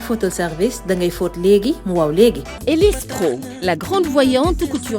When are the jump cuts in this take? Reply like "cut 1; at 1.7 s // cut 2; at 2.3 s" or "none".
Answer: cut 1; at 2.5 s